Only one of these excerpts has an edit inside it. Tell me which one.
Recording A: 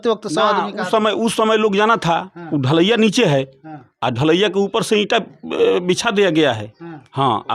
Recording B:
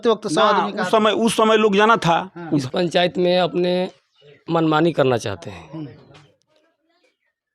B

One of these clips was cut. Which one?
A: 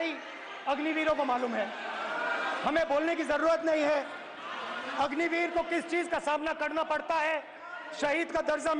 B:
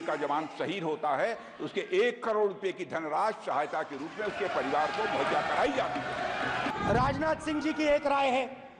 B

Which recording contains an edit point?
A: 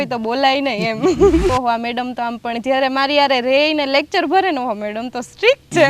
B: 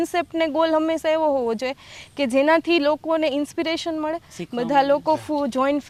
A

